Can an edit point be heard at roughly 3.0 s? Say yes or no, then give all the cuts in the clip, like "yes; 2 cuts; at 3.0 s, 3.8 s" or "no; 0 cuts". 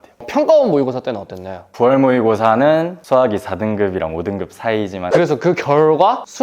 yes; 3 cuts; at 1.7 s, 3.0 s, 5.0 s